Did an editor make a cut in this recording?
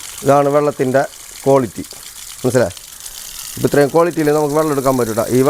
no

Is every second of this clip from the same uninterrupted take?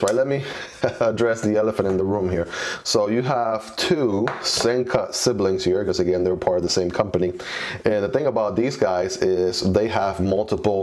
yes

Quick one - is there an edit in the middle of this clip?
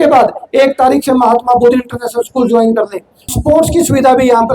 yes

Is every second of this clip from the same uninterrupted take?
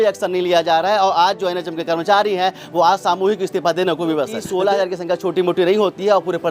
no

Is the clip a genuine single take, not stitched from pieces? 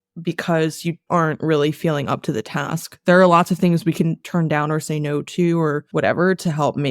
no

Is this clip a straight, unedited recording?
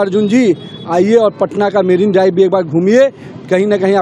yes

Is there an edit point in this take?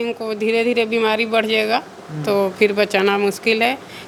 no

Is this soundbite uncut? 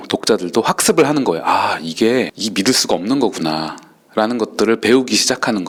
yes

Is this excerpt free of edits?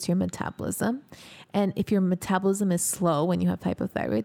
yes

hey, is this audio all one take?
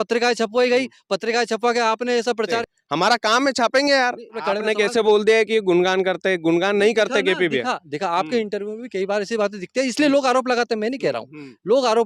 no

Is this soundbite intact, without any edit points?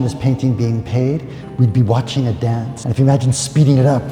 no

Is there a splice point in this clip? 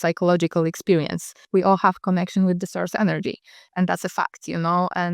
yes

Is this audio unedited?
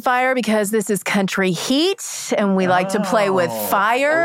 yes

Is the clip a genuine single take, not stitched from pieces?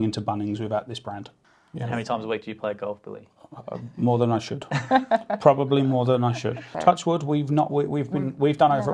no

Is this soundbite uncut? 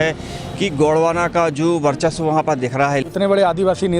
no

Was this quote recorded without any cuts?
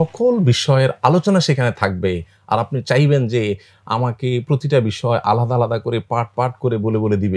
yes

